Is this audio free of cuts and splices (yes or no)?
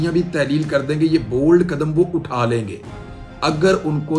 yes